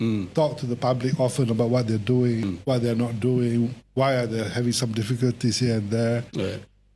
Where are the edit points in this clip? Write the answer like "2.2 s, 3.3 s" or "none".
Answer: 2.5 s

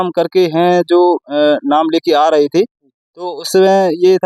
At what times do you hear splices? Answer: none

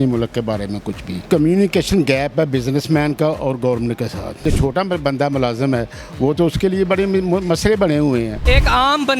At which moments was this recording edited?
1.2 s, 4.4 s, 8.4 s

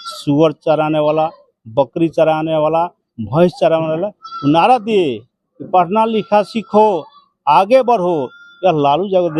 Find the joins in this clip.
none

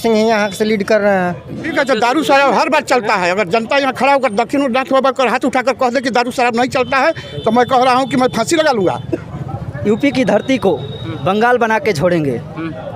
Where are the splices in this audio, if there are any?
1.7 s, 9.3 s

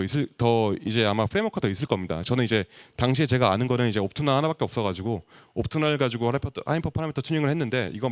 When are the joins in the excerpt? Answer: none

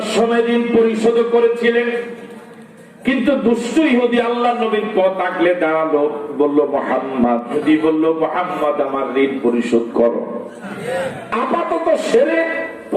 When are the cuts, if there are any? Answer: 7.5 s, 10.7 s

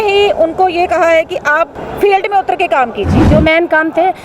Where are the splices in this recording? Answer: 1.8 s, 3.2 s

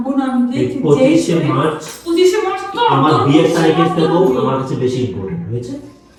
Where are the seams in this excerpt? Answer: none

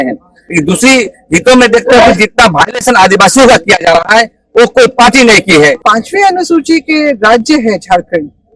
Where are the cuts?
5.8 s

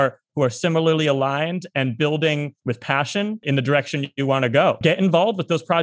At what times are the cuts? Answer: 3.4 s, 4.8 s

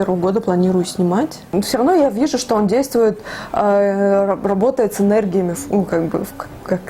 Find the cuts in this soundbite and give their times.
1.4 s

